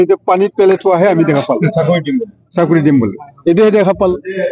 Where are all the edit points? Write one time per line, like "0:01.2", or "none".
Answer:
none